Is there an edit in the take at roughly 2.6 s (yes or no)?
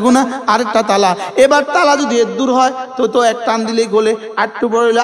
no